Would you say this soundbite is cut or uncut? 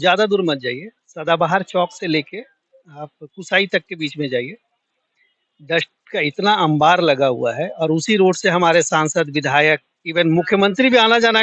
uncut